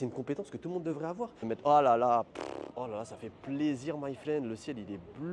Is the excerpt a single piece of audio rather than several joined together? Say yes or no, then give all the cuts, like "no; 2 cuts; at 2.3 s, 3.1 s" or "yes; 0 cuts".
no; 1 cut; at 1.4 s